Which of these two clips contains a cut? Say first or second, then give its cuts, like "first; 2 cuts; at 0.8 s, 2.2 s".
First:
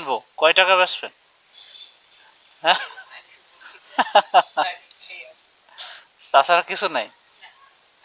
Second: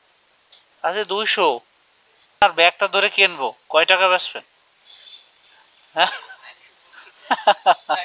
second; 1 cut; at 2.4 s